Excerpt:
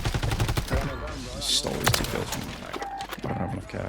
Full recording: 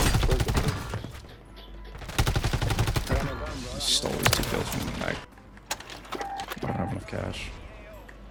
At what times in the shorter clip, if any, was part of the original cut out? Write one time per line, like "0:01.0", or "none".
0:02.6